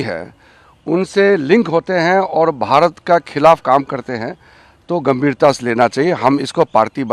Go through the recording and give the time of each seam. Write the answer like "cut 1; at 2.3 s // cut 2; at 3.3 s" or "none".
none

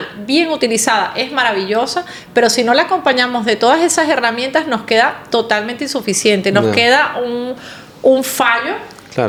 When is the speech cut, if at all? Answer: none

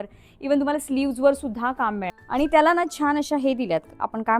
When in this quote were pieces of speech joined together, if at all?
cut 1; at 2.1 s

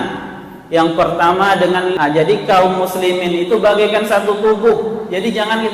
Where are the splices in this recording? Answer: cut 1; at 1.9 s

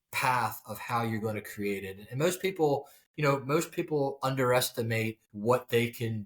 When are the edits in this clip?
none

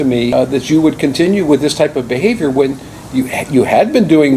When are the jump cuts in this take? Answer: none

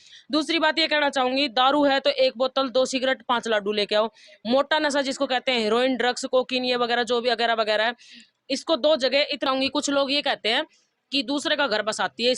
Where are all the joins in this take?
cut 1; at 9.4 s

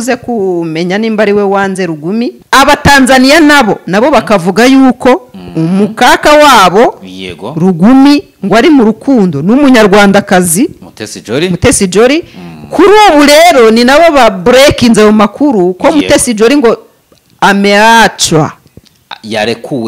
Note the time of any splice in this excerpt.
cut 1; at 2.4 s

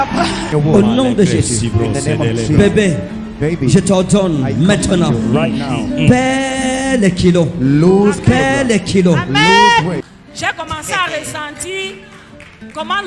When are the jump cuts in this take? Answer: cut 1; at 10.1 s

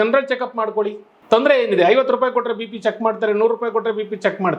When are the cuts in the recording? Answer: cut 1; at 1.1 s

